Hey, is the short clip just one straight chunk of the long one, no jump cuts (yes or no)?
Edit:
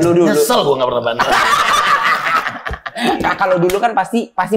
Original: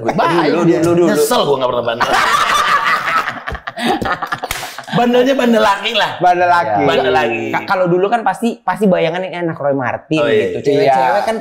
no